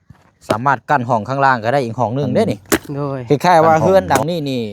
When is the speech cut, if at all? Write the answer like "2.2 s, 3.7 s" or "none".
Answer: 3.2 s